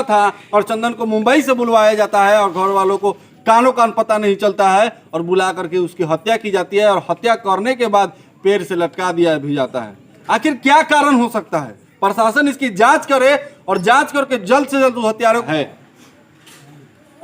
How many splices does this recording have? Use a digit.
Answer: 1